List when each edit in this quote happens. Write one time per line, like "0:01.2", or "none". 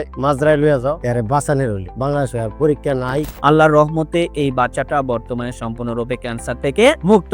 0:01.0
0:03.3